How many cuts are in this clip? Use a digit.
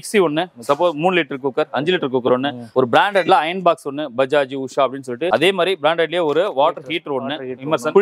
2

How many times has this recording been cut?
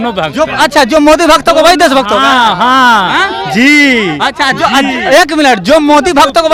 0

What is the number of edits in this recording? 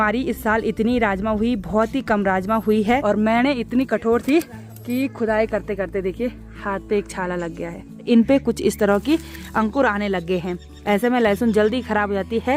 2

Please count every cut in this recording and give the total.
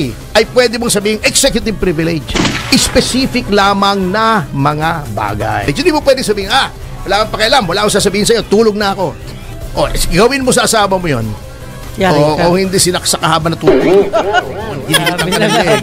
1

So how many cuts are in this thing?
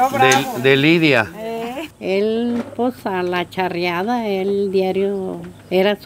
1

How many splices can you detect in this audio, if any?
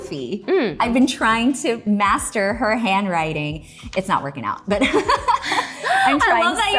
2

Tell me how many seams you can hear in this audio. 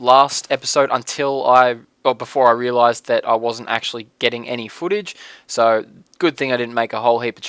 1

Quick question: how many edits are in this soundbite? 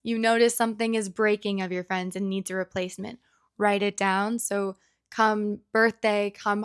0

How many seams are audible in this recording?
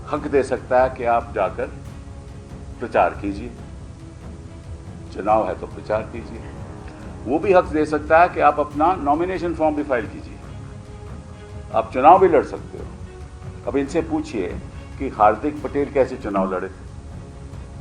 0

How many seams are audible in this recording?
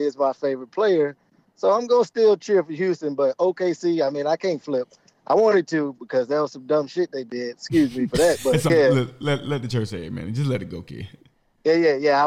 1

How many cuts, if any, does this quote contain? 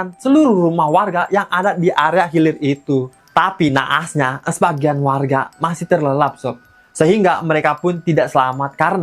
1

